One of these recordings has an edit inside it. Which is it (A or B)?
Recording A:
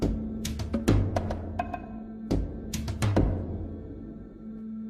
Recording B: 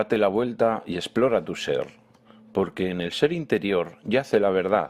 A